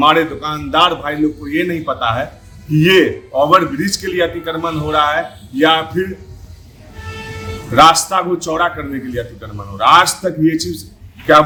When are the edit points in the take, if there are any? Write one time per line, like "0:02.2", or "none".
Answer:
none

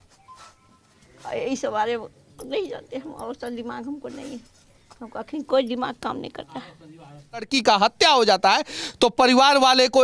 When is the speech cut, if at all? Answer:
0:07.5

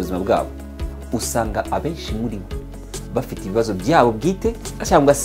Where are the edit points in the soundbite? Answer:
none

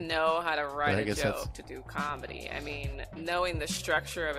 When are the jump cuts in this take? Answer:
0:03.1

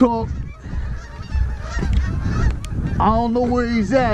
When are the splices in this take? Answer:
none

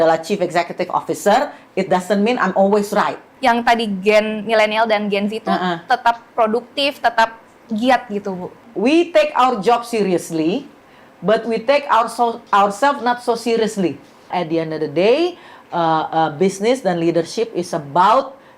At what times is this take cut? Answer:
0:03.2
0:08.6
0:14.3

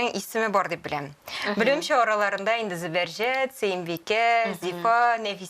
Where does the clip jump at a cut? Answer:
none

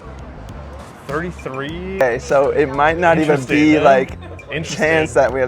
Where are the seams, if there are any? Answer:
0:02.0

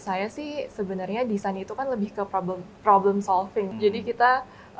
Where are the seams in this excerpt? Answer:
0:03.7

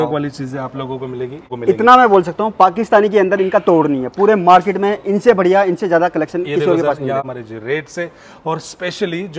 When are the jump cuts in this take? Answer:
0:01.4
0:07.3

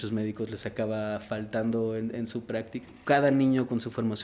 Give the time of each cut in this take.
0:02.9

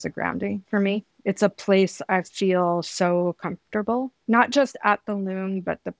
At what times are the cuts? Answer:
0:01.0
0:04.2

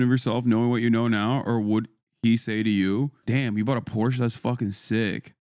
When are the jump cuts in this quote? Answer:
0:03.2

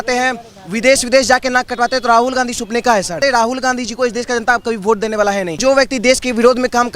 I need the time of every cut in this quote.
0:03.2
0:05.6

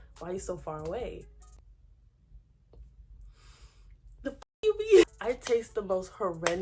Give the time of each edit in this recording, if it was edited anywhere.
0:05.0

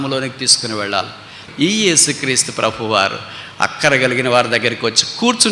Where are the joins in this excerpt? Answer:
0:01.4

